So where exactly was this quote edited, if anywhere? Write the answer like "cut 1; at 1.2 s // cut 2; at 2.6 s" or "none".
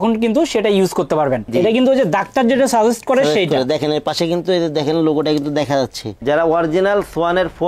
cut 1; at 1.5 s // cut 2; at 6.1 s